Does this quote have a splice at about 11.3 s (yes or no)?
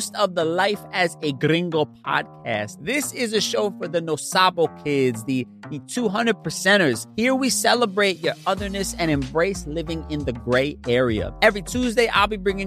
yes